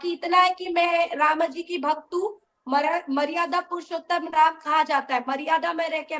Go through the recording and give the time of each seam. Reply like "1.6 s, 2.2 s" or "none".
none